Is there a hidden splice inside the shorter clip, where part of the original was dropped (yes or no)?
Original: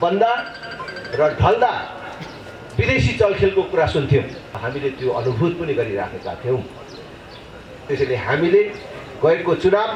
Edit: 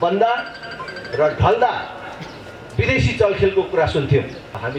no